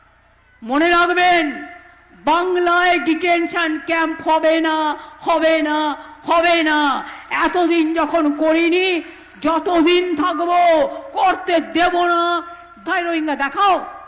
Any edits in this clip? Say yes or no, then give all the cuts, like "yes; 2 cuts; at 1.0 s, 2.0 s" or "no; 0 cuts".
yes; 1 cut; at 12.8 s